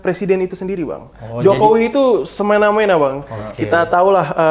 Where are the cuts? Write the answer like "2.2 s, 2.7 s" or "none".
none